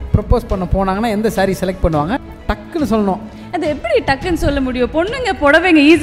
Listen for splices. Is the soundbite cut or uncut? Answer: cut